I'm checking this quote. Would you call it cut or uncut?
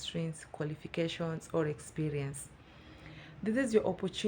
uncut